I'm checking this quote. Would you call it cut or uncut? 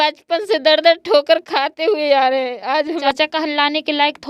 cut